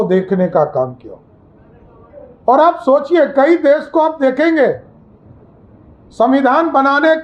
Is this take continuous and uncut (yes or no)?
yes